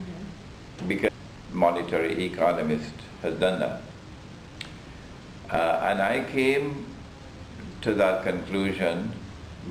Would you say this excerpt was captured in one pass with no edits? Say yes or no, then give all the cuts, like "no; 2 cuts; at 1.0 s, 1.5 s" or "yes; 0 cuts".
yes; 0 cuts